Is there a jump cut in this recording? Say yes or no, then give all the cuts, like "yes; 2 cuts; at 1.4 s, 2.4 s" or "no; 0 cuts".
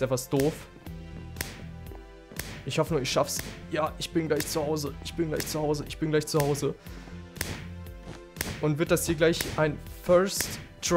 no; 0 cuts